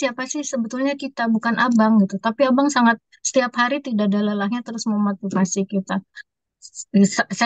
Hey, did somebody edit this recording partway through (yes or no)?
no